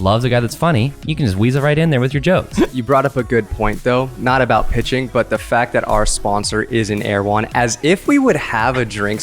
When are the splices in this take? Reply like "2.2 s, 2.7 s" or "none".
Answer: 2.8 s